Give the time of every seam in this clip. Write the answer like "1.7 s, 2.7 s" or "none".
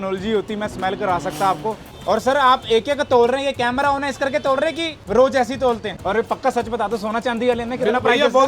1.9 s, 4.9 s, 5.9 s